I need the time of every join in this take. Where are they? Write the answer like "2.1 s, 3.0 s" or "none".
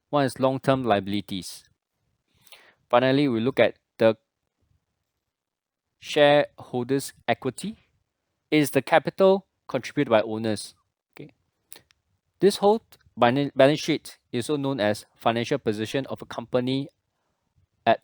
14.8 s